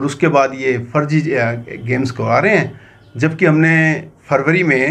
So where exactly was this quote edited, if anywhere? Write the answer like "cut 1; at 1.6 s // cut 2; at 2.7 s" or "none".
none